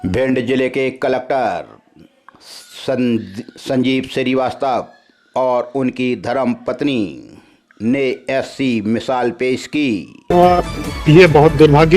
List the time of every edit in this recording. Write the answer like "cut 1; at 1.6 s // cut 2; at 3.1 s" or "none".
cut 1; at 10.1 s